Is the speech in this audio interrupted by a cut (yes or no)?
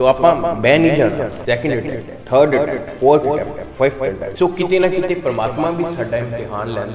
yes